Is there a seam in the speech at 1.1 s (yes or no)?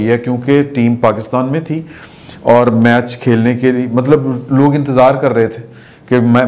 no